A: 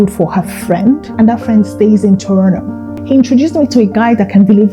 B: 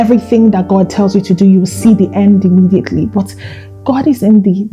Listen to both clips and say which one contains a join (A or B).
A